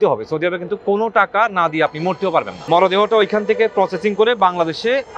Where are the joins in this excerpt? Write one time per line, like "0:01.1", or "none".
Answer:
0:02.6